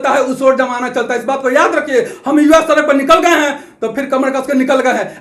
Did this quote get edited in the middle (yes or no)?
no